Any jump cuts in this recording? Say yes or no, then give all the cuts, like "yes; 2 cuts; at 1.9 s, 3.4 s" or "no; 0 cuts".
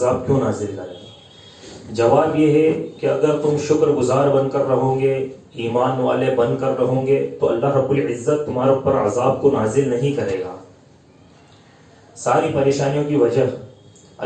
no; 0 cuts